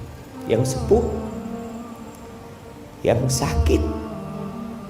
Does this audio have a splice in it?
yes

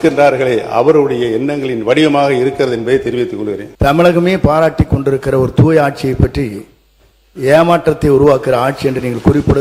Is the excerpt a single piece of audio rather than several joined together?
no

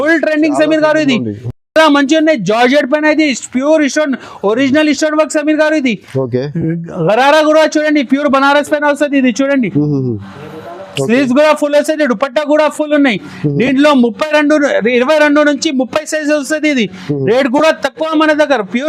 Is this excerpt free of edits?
yes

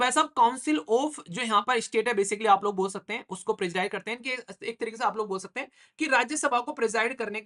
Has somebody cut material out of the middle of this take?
no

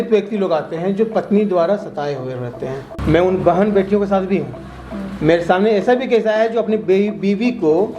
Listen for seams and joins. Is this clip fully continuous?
no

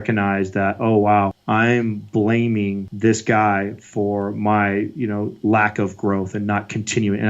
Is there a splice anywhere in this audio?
yes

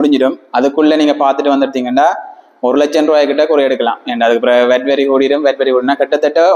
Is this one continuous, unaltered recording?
yes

